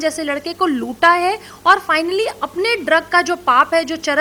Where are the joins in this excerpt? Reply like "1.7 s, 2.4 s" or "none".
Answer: none